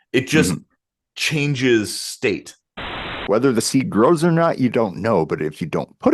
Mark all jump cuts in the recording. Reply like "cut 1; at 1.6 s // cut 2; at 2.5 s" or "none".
cut 1; at 3.1 s